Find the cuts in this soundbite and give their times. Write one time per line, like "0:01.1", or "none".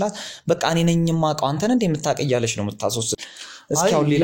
0:03.2